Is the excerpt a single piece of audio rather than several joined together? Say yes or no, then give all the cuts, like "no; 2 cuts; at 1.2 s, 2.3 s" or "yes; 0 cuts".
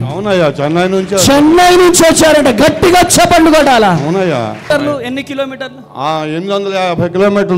no; 1 cut; at 4.7 s